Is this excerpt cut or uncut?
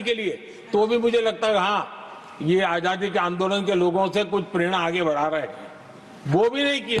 uncut